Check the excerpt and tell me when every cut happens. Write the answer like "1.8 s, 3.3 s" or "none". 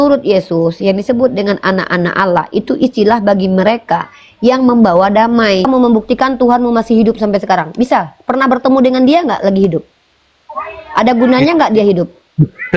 5.7 s